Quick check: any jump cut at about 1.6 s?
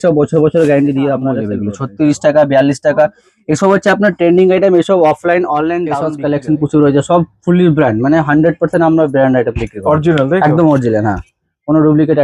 yes; 2 cuts; at 1.6 s, 6.0 s

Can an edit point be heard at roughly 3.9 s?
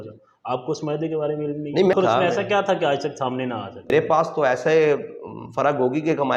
yes; 2 cuts; at 1.9 s, 3.9 s

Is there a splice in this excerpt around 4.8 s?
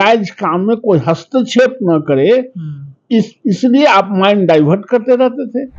no; 0 cuts

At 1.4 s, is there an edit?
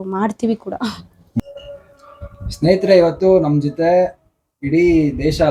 yes; 1 cut; at 1.4 s

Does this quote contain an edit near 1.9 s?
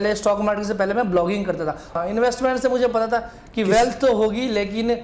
yes; 1 cut; at 1.9 s

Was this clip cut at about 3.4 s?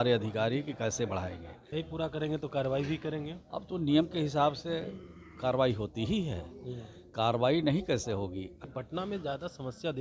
no; 2 cuts; at 1.5 s, 8.7 s

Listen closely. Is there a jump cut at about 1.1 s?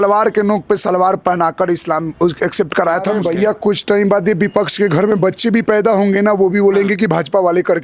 no; 1 cut; at 3.2 s

